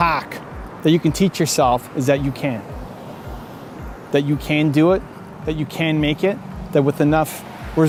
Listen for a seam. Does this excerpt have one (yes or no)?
no